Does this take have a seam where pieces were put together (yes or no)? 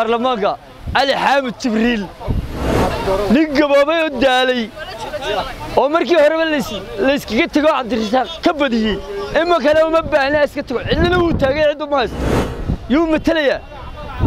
yes